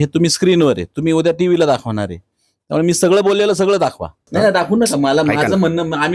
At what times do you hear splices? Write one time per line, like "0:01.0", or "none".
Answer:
0:04.2

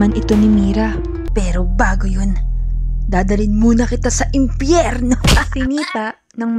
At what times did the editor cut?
0:01.1

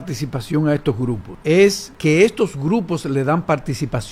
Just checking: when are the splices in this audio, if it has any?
0:01.3
0:01.9

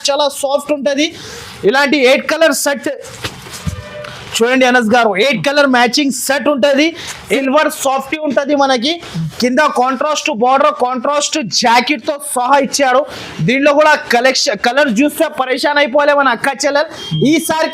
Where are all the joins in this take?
0:07.3

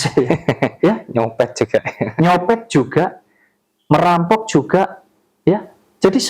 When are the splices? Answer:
0:05.0

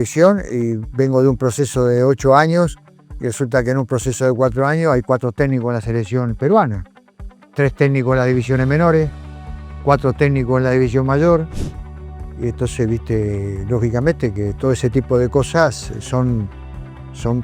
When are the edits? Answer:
none

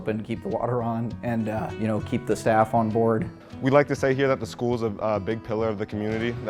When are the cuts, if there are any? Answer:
0:01.7
0:03.3

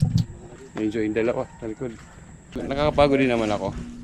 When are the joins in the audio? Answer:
0:02.5

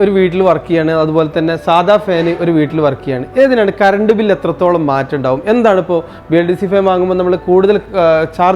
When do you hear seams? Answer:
none

